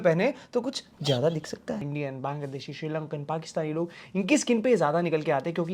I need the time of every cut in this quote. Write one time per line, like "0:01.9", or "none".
0:01.9